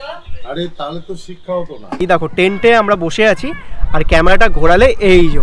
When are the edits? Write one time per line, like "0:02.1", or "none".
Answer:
0:02.0